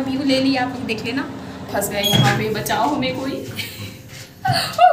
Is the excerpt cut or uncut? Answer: cut